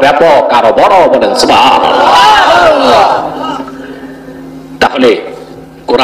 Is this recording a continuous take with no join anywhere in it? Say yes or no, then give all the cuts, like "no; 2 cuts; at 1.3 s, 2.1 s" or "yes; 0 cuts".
yes; 0 cuts